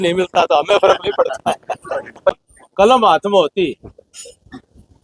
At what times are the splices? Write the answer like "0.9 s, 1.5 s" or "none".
2.3 s